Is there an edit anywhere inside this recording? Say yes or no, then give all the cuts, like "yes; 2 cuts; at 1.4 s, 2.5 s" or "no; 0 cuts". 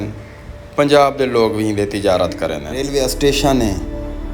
yes; 1 cut; at 2.7 s